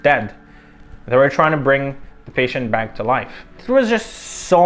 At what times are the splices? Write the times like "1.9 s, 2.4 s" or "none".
none